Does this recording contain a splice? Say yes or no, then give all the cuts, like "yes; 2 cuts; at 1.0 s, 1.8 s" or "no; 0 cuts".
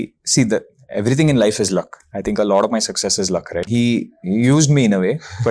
yes; 1 cut; at 3.7 s